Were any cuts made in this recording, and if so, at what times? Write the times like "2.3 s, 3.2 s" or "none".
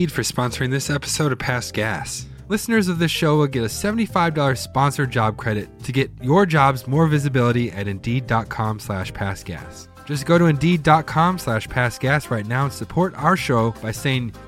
2.5 s